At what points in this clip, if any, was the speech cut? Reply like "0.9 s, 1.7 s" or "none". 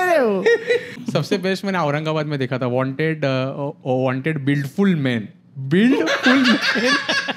1.0 s